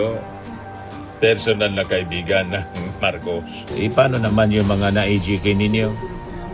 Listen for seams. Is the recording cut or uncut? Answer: cut